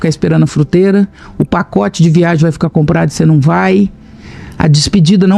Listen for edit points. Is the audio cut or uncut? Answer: uncut